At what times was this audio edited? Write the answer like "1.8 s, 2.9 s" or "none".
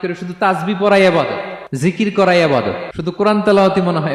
1.9 s, 2.9 s